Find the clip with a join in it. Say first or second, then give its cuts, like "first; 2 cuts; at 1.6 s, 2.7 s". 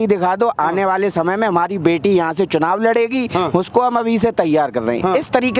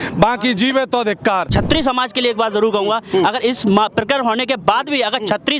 second; 1 cut; at 1.5 s